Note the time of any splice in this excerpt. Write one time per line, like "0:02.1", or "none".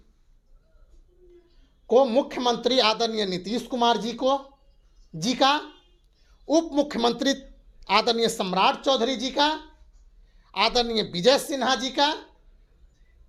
none